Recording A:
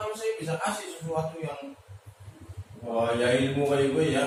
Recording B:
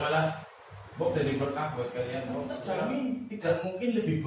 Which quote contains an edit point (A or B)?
B